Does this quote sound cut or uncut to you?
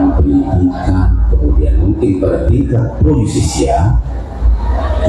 uncut